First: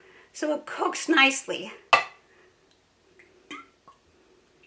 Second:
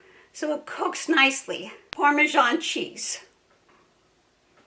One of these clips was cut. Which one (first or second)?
second